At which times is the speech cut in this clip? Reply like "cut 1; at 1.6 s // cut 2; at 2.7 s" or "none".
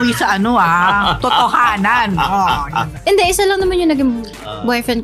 cut 1; at 3.0 s

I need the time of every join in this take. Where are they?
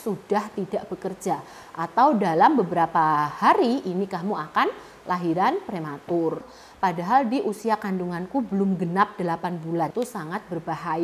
cut 1; at 6.4 s // cut 2; at 9.9 s

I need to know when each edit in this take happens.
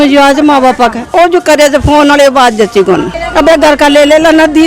cut 1; at 1.1 s // cut 2; at 3.2 s

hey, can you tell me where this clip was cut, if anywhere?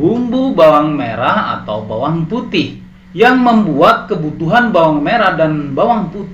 none

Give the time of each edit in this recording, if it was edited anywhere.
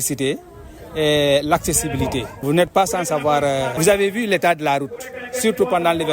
cut 1; at 2.4 s // cut 2; at 3.8 s

